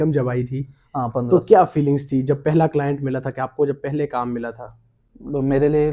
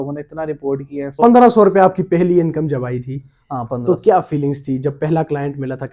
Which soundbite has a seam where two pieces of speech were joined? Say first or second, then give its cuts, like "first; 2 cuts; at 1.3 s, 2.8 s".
second; 1 cut; at 1.2 s